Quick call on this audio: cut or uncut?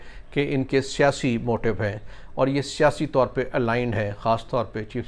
uncut